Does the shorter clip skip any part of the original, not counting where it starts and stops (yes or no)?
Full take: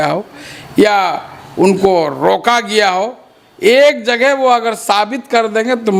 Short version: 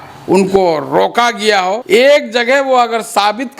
yes